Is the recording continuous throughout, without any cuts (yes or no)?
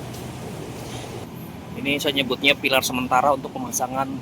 no